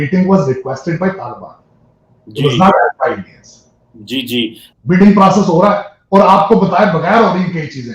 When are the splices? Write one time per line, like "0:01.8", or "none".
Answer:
0:04.6